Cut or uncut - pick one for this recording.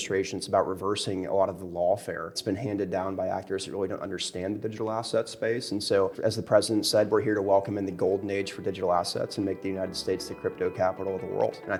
uncut